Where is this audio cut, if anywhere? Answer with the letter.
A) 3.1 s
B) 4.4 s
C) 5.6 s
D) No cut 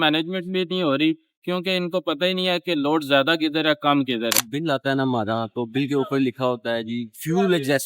B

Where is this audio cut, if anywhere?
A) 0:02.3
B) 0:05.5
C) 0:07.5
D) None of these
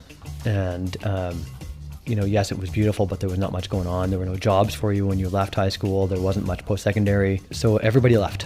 C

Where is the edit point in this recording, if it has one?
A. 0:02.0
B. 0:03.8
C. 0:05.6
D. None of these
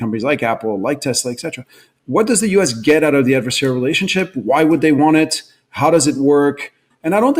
D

